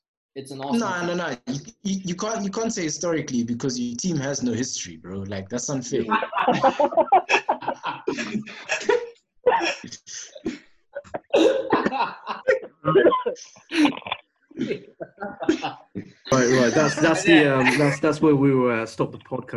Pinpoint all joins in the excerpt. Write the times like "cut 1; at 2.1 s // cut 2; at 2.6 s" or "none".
cut 1; at 16.3 s